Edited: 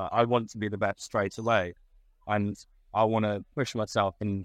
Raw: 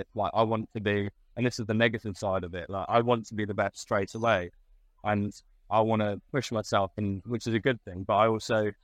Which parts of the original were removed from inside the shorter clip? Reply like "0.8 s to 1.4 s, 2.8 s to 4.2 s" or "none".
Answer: none